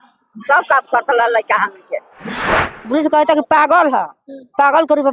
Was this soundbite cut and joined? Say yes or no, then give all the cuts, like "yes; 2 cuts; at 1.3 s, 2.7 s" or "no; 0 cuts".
yes; 1 cut; at 2.7 s